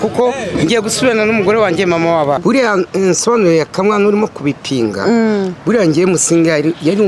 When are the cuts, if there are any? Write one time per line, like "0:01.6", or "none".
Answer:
0:02.4